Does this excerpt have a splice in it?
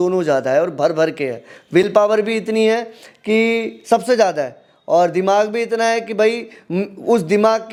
no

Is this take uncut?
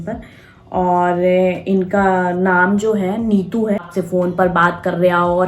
no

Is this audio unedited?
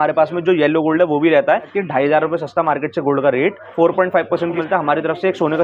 no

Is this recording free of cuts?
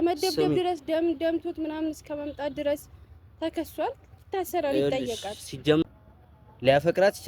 no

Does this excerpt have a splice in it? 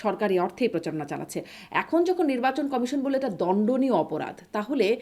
no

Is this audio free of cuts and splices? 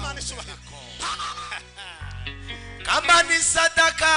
no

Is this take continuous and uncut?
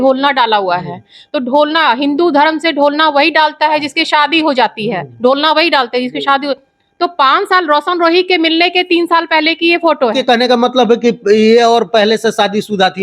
no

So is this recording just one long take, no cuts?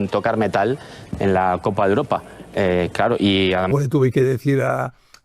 no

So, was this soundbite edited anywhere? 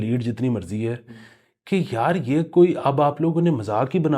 no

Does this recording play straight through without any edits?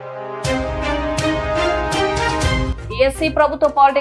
no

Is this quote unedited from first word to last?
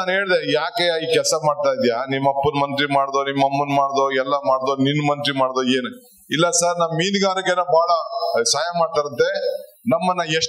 yes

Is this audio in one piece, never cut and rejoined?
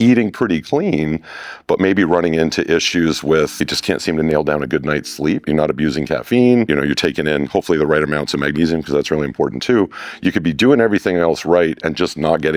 no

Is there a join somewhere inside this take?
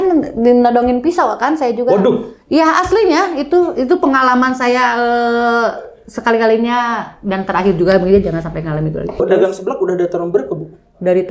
yes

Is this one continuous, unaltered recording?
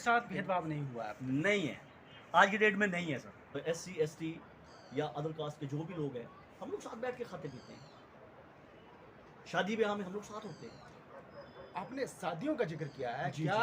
no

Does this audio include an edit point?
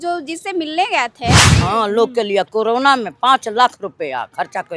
yes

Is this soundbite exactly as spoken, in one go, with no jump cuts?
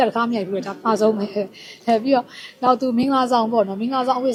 yes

